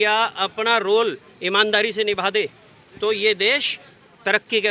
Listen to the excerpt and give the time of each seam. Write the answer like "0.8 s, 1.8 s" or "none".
none